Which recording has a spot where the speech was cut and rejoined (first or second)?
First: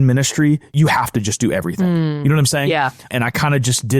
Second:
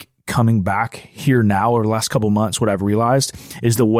first